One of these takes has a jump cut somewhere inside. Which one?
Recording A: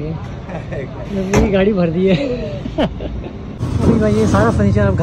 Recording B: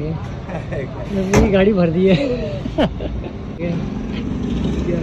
A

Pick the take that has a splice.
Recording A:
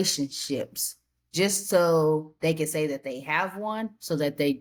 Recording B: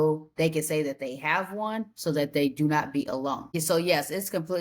B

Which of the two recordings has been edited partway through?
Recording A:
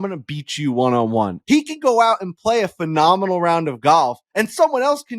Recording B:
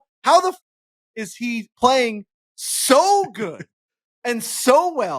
A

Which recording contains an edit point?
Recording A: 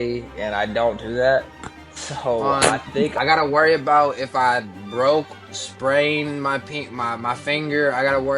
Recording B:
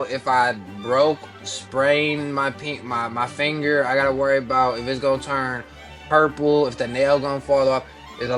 A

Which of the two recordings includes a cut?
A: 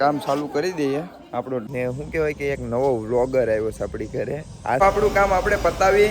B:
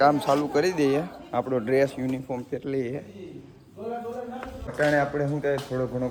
A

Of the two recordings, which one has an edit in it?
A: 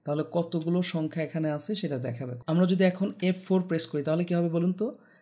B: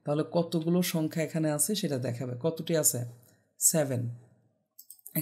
A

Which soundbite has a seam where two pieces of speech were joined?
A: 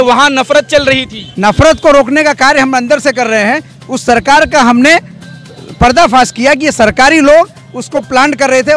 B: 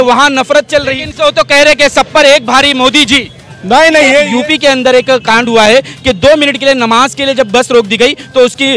B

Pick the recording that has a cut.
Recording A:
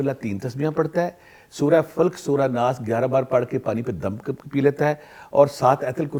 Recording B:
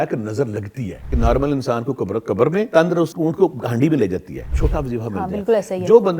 B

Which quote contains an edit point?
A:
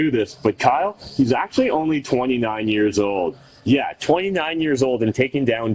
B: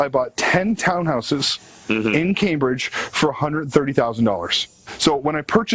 B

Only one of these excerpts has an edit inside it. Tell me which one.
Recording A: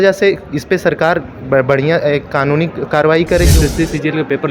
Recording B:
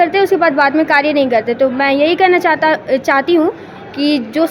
A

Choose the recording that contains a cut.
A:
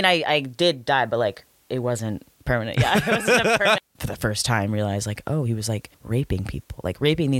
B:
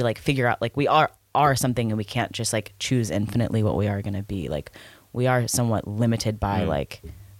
A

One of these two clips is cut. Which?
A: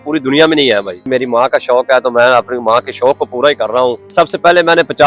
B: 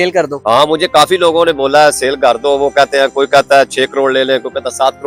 A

